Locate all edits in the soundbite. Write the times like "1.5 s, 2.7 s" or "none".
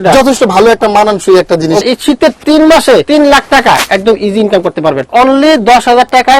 1.8 s, 3.1 s, 5.1 s